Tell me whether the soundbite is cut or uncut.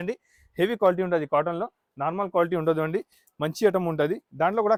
uncut